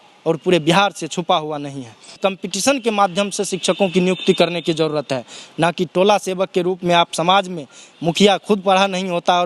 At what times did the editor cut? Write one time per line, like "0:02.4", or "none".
0:02.2